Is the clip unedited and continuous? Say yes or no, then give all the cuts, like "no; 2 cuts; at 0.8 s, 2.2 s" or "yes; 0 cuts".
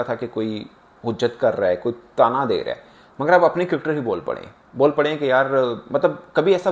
yes; 0 cuts